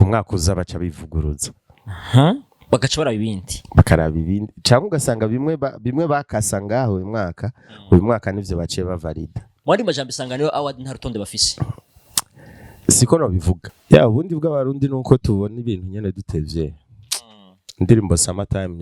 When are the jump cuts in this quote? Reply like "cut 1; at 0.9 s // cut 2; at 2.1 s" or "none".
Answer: cut 1; at 13.6 s

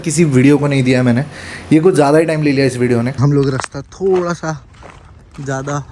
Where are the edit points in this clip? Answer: cut 1; at 3.1 s

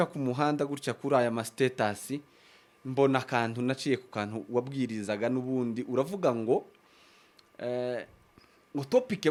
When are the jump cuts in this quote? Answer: none

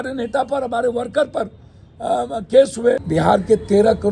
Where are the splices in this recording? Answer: cut 1; at 3.0 s

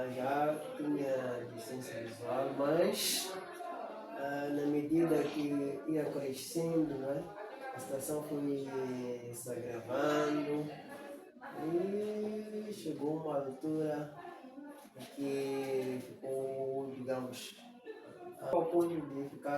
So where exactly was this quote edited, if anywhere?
cut 1; at 18.5 s

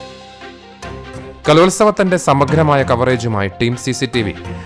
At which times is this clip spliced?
cut 1; at 1.2 s

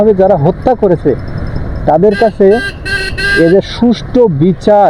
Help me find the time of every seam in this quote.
none

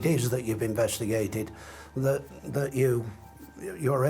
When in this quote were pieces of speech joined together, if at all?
none

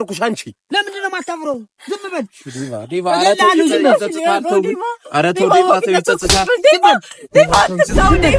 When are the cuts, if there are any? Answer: none

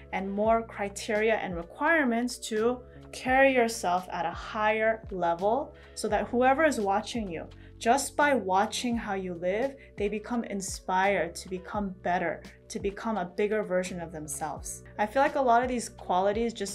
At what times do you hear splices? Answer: cut 1; at 14.8 s

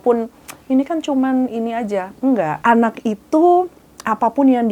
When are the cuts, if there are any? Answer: cut 1; at 2.6 s

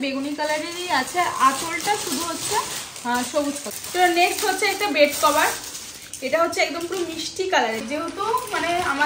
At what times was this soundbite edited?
cut 1; at 3.7 s // cut 2; at 7.8 s

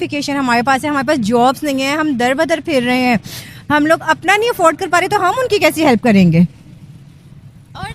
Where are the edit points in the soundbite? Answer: none

